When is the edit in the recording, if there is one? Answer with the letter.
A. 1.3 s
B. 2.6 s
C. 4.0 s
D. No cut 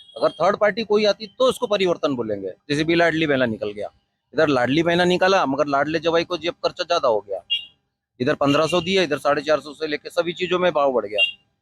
B